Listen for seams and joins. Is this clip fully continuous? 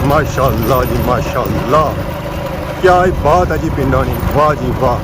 yes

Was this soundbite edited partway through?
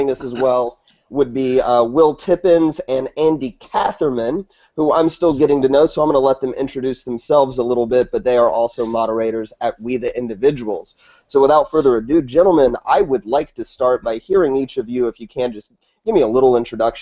no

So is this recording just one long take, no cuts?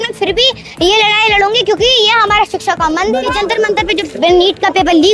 no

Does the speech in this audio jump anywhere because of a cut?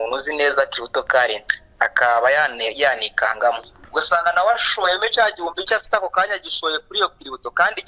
yes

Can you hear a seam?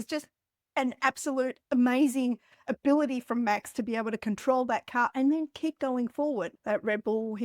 yes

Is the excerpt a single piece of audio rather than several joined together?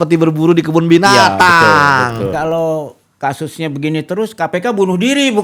no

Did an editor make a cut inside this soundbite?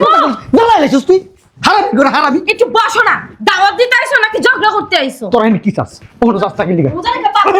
no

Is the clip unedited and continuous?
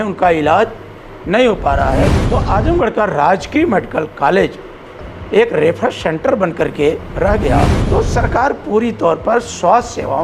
no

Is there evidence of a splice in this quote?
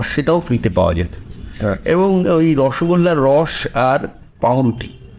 no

